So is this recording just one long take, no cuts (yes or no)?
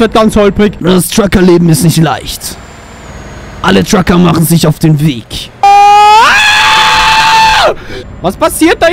no